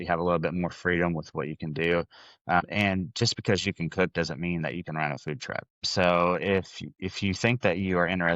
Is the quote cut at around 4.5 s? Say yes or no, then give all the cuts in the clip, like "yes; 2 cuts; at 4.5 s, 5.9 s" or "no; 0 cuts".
no; 2 cuts; at 2.6 s, 5.9 s